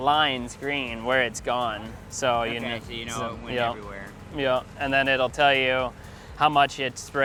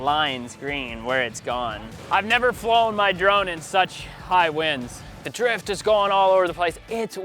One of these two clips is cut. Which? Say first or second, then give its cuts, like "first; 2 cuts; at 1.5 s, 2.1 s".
second; 2 cuts; at 1.9 s, 5.3 s